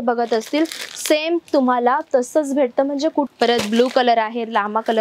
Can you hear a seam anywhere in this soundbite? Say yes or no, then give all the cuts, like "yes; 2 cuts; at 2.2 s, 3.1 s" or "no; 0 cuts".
yes; 1 cut; at 3.3 s